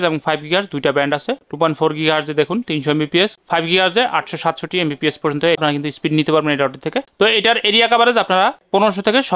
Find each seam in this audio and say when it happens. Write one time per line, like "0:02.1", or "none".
none